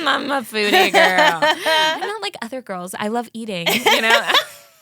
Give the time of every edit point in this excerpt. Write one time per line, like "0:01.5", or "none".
0:02.0